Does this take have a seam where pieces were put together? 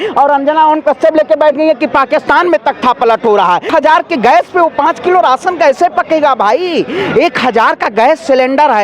yes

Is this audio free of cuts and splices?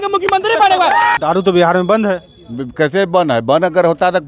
no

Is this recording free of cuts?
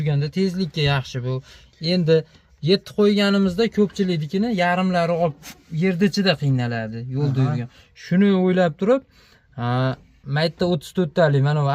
yes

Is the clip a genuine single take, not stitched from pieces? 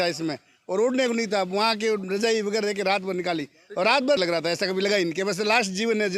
no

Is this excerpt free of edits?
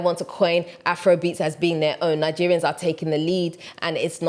yes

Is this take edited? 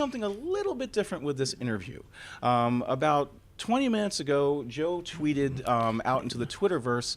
yes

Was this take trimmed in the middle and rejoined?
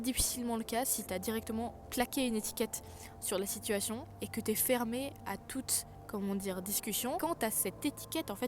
yes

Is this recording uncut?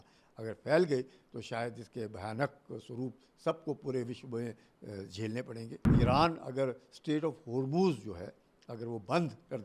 no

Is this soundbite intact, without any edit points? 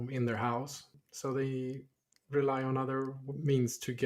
yes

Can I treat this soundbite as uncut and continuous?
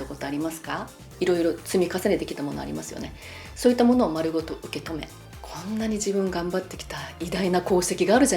no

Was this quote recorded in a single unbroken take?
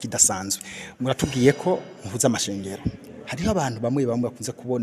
yes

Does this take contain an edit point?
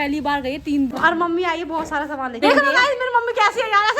yes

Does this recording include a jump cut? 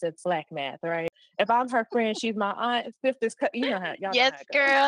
yes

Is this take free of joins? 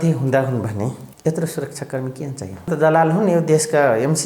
no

